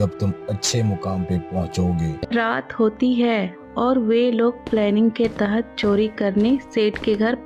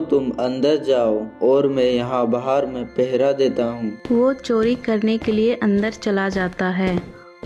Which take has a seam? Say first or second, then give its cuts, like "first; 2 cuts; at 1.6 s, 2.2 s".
first; 1 cut; at 2.3 s